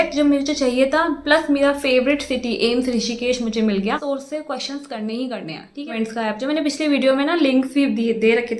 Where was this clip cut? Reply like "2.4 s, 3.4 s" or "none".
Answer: 4.0 s, 5.9 s